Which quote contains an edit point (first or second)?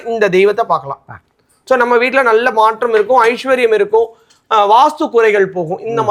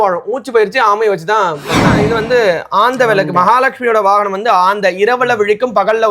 second